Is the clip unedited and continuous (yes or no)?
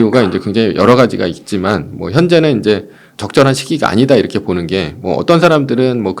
yes